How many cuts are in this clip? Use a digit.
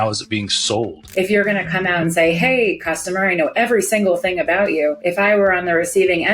2